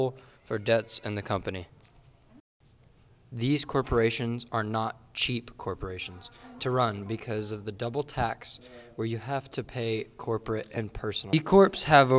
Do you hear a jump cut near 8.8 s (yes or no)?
no